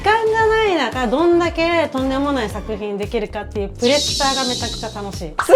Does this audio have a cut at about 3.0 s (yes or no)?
no